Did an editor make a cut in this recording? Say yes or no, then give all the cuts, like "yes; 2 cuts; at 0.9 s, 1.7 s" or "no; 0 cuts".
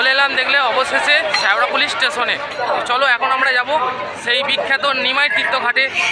no; 0 cuts